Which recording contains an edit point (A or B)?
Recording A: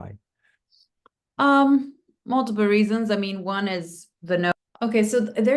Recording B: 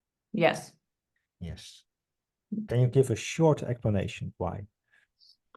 A